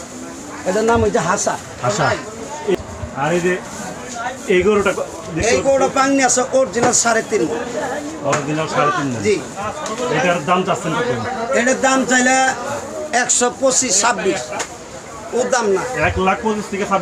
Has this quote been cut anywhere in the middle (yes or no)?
yes